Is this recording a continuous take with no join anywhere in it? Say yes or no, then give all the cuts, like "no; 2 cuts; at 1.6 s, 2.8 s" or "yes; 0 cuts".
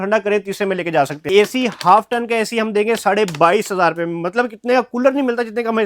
no; 1 cut; at 1.2 s